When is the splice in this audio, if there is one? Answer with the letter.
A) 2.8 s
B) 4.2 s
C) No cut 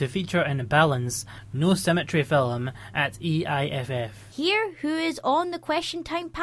B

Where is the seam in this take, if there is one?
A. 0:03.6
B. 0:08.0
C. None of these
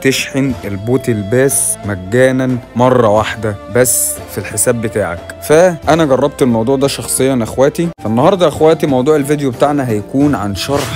B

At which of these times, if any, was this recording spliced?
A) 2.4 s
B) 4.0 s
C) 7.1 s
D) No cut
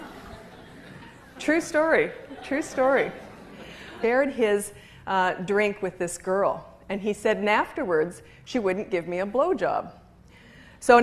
D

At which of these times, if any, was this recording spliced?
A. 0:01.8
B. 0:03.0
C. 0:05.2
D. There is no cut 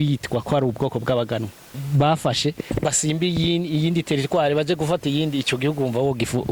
A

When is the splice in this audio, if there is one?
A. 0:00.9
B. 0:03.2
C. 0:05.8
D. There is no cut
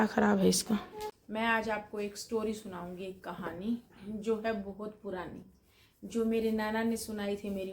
A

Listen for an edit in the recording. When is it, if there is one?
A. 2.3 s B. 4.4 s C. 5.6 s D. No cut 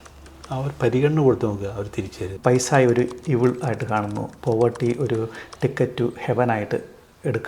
A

